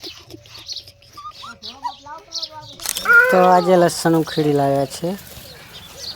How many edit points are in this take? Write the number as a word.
one